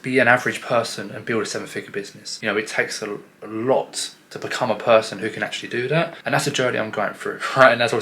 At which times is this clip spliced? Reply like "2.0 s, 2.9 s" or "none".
2.2 s, 6.2 s